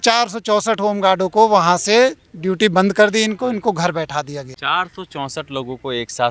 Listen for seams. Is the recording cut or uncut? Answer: cut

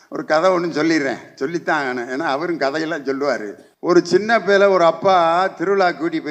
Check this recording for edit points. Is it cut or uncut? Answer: cut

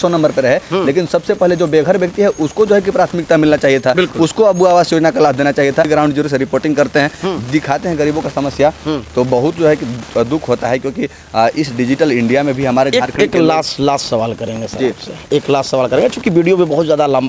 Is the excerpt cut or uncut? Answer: uncut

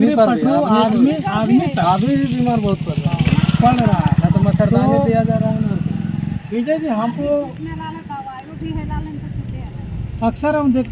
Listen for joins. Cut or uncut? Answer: uncut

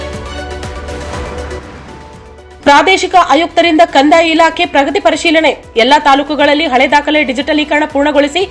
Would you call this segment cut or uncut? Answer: cut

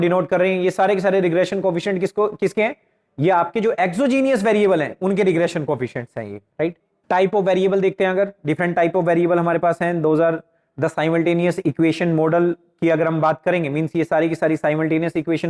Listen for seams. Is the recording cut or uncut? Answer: cut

